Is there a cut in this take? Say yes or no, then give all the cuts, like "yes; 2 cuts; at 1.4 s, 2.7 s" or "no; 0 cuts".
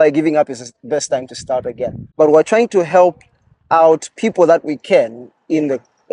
yes; 1 cut; at 2.0 s